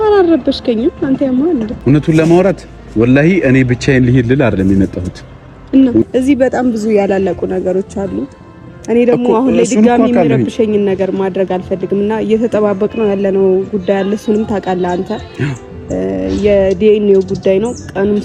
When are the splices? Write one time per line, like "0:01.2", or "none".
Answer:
0:01.7
0:06.0